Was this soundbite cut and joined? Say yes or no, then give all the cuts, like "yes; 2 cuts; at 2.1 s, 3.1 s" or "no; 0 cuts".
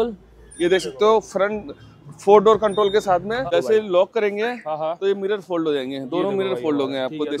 yes; 1 cut; at 3.5 s